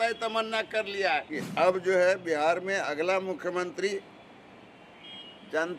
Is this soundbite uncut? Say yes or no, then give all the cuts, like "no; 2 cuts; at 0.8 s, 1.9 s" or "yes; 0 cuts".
no; 1 cut; at 1.4 s